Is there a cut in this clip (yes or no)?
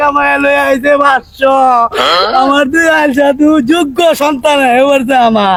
no